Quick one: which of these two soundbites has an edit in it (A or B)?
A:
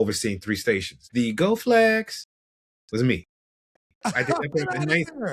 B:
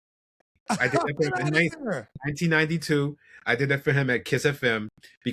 A